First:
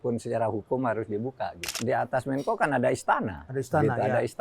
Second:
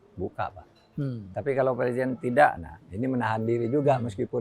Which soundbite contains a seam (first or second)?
first